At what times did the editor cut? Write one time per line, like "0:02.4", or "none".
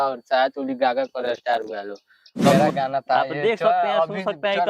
0:02.6